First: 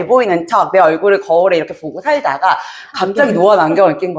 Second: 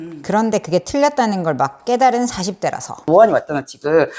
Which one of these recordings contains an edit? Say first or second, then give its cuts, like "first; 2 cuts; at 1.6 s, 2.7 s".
second; 1 cut; at 3.0 s